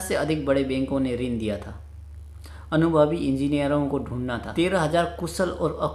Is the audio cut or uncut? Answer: cut